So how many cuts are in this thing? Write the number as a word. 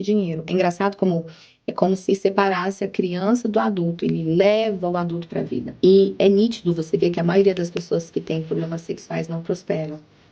one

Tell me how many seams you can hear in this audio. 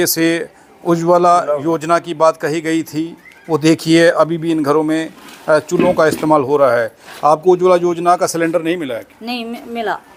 zero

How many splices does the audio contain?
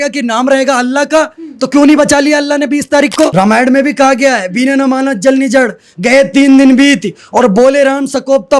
one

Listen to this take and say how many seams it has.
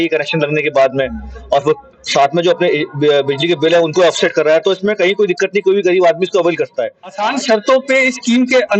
one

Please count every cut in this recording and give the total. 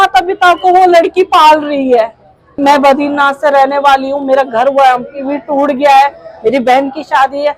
one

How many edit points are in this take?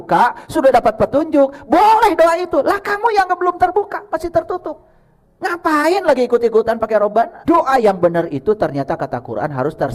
one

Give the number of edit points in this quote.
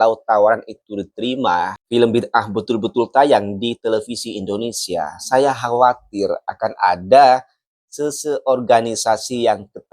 one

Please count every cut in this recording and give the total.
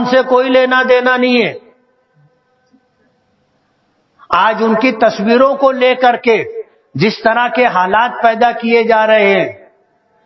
zero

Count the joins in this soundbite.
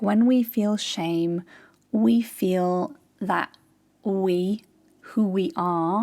zero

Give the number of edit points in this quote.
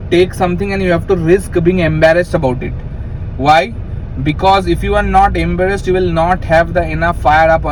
zero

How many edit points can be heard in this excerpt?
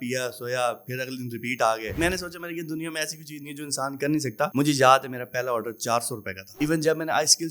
three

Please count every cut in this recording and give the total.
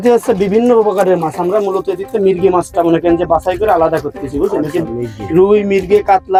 zero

